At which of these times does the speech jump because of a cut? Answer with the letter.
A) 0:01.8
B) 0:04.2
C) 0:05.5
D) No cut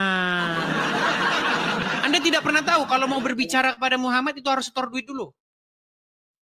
A